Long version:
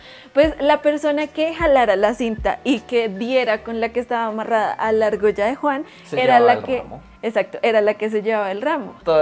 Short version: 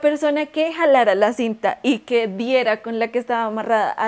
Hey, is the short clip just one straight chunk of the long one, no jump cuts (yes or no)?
yes